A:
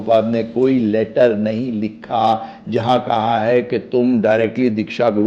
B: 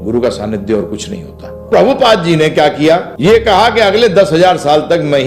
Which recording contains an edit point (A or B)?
B